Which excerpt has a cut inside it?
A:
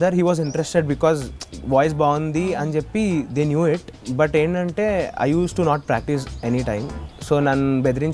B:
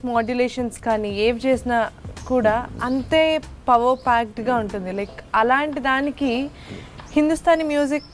A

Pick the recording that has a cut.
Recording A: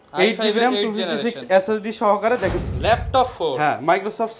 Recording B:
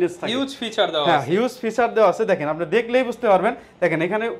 A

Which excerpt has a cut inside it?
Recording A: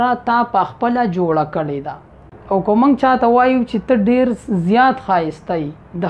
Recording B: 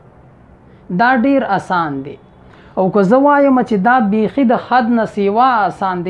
A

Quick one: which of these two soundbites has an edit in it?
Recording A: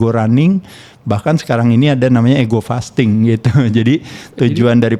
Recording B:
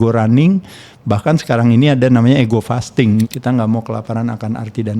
B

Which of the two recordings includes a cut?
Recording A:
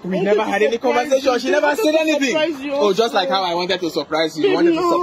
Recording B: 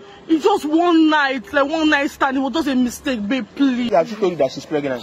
B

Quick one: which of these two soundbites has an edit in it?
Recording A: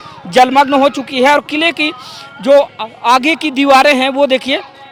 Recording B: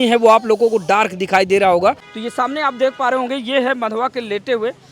B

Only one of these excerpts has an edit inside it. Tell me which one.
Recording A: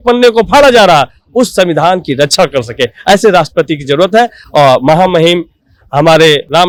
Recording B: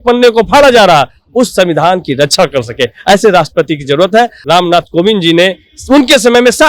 B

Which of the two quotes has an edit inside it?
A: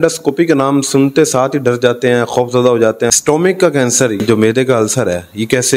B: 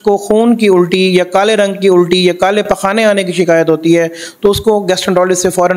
A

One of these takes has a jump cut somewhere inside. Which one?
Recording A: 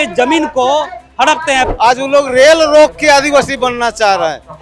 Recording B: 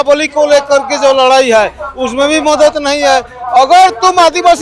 A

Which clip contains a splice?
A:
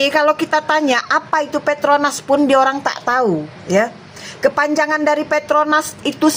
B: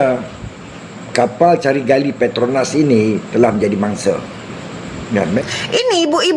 B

